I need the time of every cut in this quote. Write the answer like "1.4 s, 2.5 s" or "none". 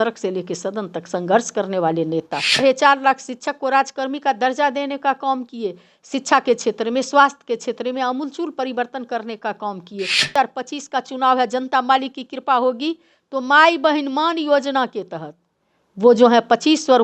2.6 s, 10.3 s